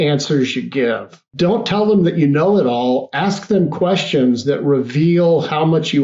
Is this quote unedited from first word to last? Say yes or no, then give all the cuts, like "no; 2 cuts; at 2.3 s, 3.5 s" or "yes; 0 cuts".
no; 1 cut; at 1.2 s